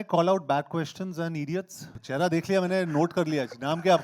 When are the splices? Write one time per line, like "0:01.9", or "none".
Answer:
0:01.9